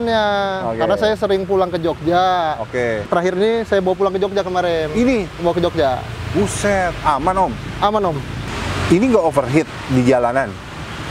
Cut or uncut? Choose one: cut